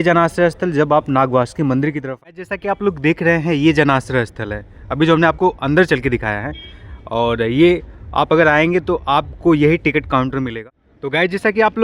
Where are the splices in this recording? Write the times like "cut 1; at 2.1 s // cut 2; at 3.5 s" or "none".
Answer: cut 1; at 2.1 s // cut 2; at 10.5 s